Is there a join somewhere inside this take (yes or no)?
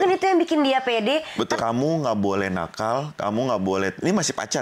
yes